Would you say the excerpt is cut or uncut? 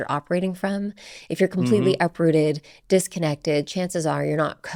uncut